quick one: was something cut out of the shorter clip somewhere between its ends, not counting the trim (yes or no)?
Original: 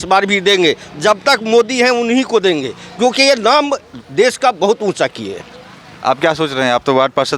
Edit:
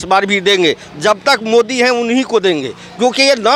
no